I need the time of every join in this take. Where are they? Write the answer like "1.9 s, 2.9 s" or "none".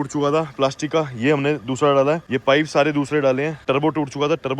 2.3 s, 3.6 s